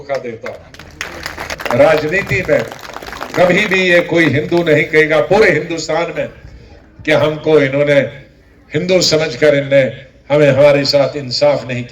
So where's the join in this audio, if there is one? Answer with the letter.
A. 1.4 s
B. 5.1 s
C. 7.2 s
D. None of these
A